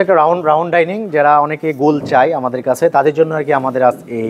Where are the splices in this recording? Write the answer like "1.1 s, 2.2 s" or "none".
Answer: none